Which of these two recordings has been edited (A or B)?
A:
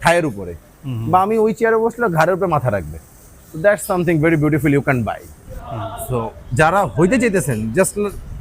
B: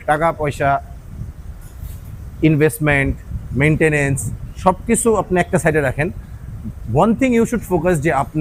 A